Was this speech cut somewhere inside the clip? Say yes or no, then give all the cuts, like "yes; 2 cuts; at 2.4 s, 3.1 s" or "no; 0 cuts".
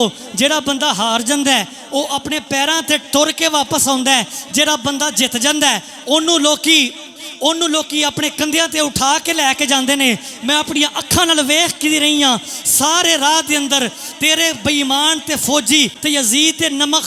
yes; 1 cut; at 16.0 s